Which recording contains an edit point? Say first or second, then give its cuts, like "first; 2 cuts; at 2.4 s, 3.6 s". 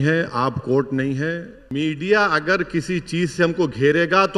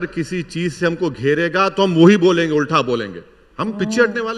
first; 1 cut; at 1.6 s